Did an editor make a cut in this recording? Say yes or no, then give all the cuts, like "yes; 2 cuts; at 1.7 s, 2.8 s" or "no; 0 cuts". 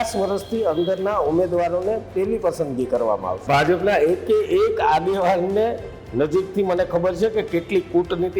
yes; 1 cut; at 3.5 s